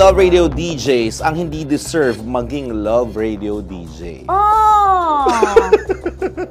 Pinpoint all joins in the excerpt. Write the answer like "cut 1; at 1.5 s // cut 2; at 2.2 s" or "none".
none